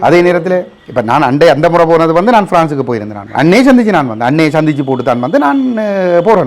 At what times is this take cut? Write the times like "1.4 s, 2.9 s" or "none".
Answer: 3.3 s